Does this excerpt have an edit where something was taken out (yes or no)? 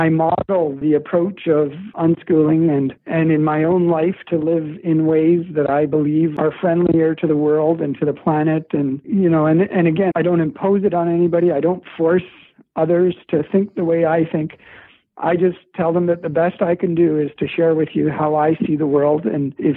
yes